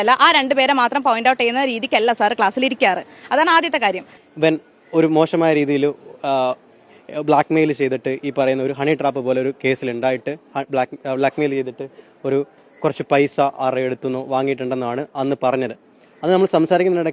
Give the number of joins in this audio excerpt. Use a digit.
1